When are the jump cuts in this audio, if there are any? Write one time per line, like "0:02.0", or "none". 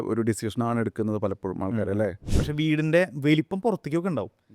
0:02.3

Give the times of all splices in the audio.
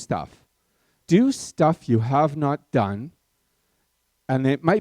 0:00.9

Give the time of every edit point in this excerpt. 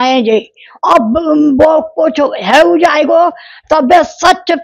none

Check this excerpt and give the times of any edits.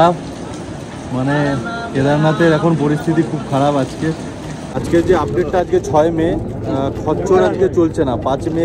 0:04.7

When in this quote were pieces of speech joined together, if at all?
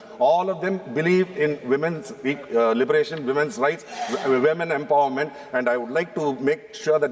none

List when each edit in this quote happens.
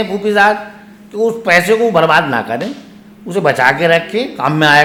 none

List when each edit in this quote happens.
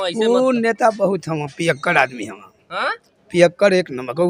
none

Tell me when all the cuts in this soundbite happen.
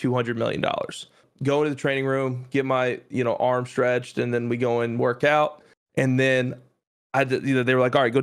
0:01.2

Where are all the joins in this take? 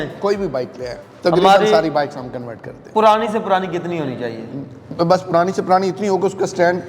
none

